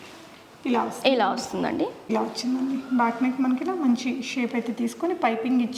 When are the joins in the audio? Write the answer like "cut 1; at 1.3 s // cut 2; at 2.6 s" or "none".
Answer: cut 1; at 2.0 s